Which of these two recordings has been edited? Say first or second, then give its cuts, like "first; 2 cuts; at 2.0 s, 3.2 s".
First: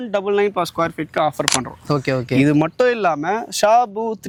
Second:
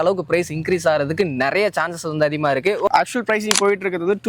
second; 1 cut; at 2.9 s